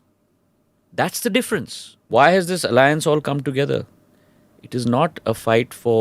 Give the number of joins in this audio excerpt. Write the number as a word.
one